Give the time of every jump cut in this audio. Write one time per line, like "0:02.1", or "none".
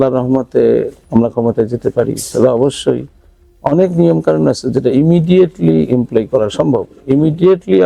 none